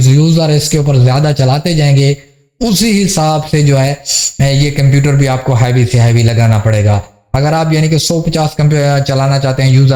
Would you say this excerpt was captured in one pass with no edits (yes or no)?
yes